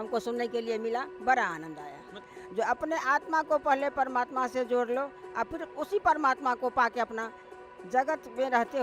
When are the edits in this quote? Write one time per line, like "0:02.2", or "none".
0:02.3